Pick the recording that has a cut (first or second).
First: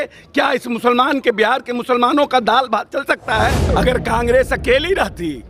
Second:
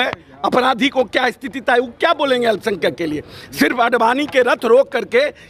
first